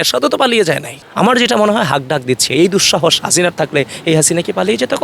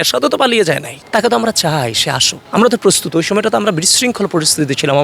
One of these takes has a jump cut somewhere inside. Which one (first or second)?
first